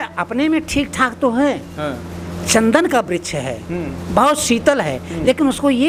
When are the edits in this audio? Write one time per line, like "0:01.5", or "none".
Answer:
none